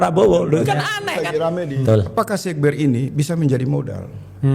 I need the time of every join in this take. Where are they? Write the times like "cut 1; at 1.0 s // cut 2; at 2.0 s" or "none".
cut 1; at 1.7 s